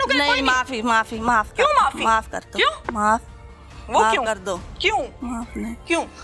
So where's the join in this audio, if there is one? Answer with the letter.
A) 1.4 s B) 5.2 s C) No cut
B